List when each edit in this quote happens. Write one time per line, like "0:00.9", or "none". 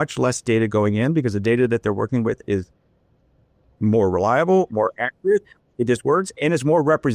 none